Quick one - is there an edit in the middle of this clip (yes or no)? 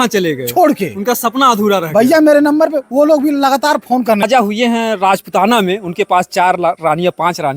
yes